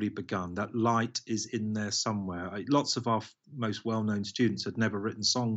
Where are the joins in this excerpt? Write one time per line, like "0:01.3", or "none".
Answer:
none

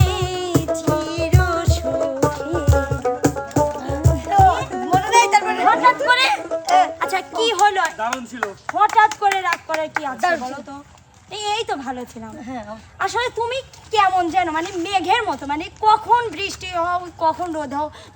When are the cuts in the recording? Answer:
none

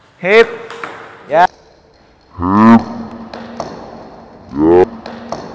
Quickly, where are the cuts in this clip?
none

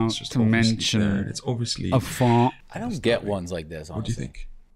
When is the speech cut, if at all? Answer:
0:02.7

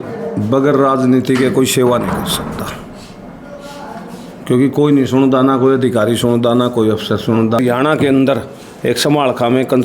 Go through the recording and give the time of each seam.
0:07.6

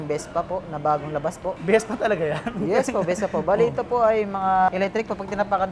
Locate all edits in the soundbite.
0:01.6
0:04.7

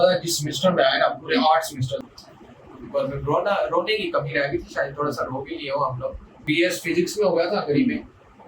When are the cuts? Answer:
0:02.1
0:06.5

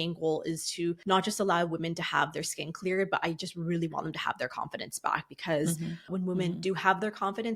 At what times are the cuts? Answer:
0:01.0
0:06.1

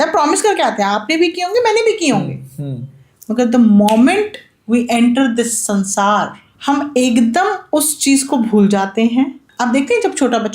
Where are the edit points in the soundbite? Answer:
0:06.4
0:09.4

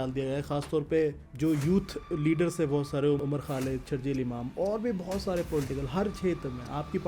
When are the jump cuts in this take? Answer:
0:01.2
0:03.2

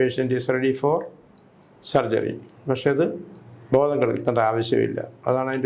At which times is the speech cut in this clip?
none

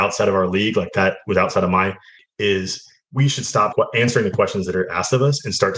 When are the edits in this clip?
0:02.2
0:03.7

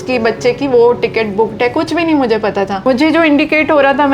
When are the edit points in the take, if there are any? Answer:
0:02.8

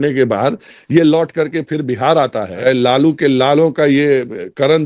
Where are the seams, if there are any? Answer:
0:02.6

